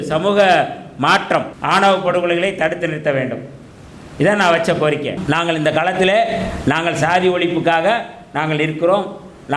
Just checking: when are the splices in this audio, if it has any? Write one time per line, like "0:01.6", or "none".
0:01.5
0:05.2